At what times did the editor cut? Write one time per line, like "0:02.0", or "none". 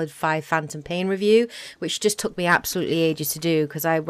0:01.6